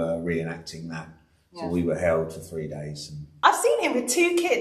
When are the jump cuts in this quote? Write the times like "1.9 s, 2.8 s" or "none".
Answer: 3.3 s